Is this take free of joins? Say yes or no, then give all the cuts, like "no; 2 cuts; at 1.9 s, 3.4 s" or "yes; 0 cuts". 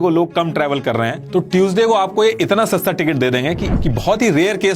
no; 1 cut; at 3.7 s